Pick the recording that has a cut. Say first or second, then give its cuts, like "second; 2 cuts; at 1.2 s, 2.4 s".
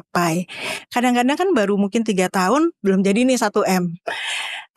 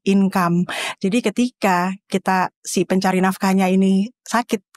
first; 1 cut; at 2.8 s